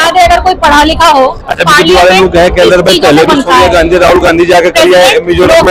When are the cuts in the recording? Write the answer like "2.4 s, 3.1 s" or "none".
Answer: none